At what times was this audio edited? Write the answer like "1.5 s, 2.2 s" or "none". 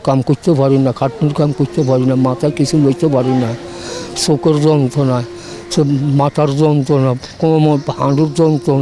none